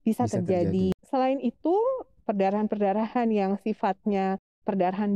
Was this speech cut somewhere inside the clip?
yes; 1 cut; at 0.9 s

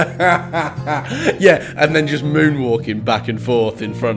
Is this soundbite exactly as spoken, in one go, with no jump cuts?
yes; 0 cuts

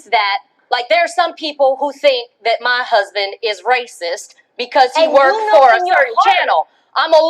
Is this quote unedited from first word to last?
no; 1 cut; at 2.5 s

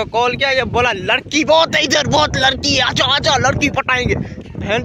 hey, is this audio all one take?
yes; 0 cuts

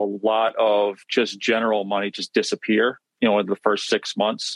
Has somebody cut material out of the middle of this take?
no; 0 cuts

